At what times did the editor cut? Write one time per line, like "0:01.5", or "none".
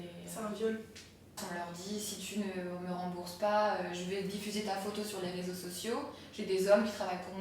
0:01.4